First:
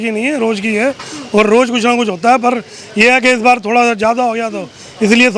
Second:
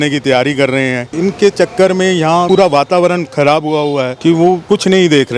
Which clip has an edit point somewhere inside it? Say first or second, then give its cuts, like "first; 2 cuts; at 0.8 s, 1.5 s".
second; 3 cuts; at 1.0 s, 2.5 s, 4.4 s